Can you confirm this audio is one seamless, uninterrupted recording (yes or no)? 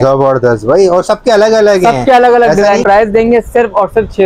no